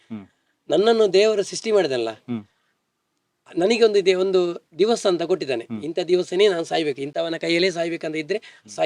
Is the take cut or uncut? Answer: uncut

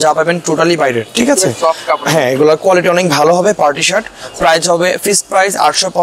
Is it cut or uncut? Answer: uncut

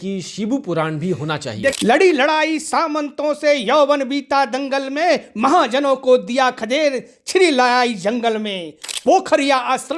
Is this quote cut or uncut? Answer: cut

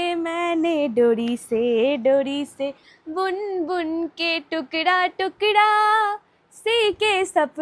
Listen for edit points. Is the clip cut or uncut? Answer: uncut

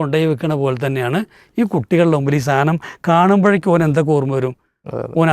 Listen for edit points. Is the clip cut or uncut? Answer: uncut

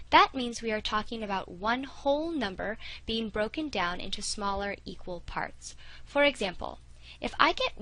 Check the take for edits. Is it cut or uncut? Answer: uncut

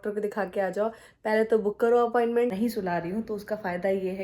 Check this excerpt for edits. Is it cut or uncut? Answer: cut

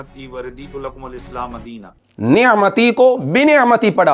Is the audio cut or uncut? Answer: cut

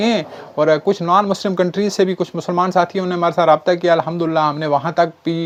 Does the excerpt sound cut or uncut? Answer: uncut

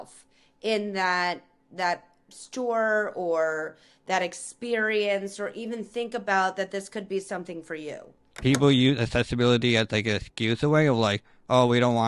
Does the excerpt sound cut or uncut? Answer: cut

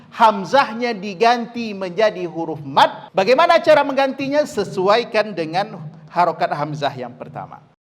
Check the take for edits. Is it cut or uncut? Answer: cut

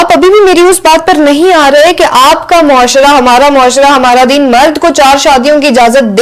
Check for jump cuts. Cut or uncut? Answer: uncut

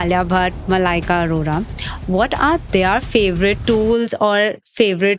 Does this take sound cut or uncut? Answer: uncut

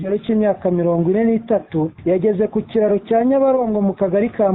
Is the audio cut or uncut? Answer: cut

